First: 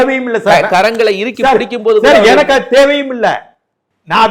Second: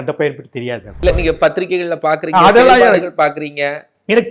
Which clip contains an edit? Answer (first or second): second